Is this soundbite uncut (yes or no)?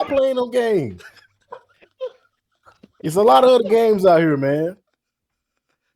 yes